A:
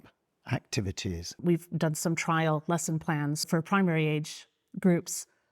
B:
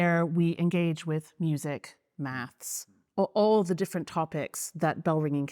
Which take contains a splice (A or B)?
A